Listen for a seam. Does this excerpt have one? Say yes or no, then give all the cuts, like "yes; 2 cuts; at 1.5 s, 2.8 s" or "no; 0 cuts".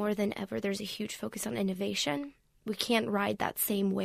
no; 0 cuts